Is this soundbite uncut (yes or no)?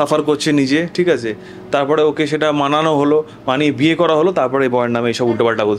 yes